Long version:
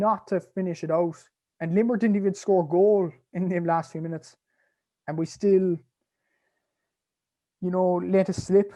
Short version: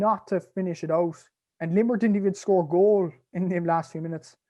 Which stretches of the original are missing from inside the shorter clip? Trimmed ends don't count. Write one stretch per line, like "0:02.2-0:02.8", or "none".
none